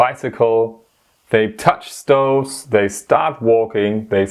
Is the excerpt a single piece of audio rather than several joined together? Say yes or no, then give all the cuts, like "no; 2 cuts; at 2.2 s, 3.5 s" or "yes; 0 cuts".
yes; 0 cuts